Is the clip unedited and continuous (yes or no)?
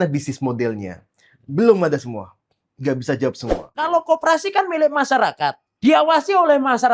no